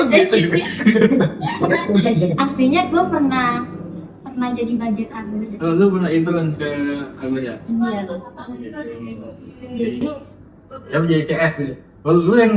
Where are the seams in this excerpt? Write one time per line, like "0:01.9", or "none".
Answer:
none